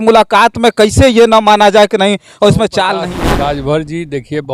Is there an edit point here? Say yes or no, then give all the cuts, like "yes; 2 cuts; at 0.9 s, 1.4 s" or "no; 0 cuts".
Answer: yes; 1 cut; at 3.1 s